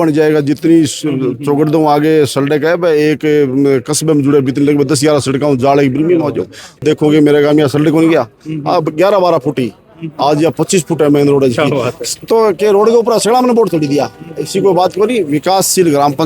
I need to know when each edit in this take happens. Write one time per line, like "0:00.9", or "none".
0:06.8